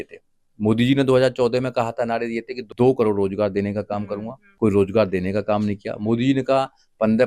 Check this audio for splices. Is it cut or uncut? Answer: cut